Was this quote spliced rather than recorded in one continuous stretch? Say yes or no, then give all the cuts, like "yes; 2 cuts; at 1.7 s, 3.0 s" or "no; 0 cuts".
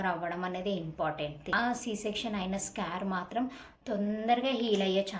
yes; 1 cut; at 1.5 s